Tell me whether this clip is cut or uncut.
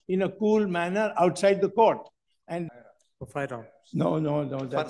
cut